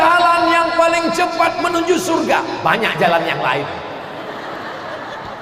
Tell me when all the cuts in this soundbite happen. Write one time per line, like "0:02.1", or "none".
none